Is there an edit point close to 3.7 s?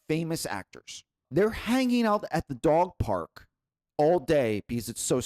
no; 1 cut; at 1.2 s

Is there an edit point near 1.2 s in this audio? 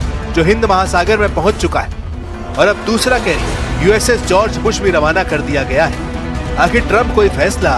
no; 0 cuts

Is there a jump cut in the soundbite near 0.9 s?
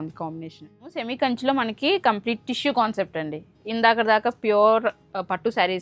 yes; 1 cut; at 0.9 s

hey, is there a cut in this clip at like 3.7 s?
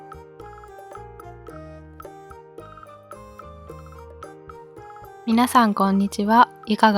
no; 1 cut; at 5.2 s

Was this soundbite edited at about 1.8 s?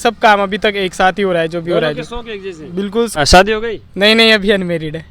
no; 1 cut; at 3.1 s

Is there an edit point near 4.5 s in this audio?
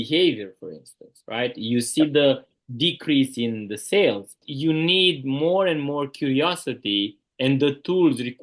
yes; 1 cut; at 4.5 s

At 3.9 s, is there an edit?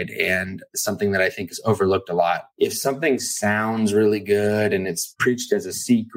no; 3 cuts; at 0.8 s, 2.5 s, 5.1 s

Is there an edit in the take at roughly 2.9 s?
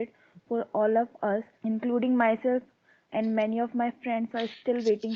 no; 1 cut; at 1.5 s

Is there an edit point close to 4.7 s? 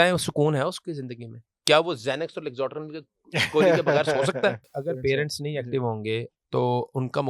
yes; 1 cut; at 4.7 s

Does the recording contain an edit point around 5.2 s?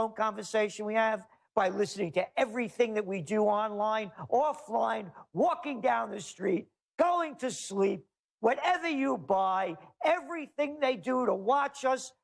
no; 1 cut; at 10.0 s

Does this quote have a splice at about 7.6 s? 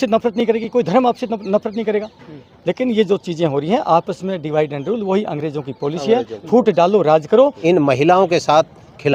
yes; 1 cut; at 7.6 s

